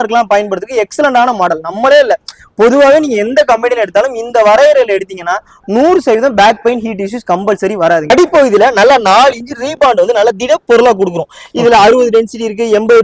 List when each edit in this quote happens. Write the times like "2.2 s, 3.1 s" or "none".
8.1 s